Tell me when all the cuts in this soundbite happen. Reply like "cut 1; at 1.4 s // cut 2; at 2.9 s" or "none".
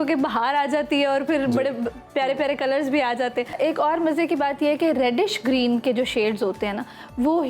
cut 1; at 3.5 s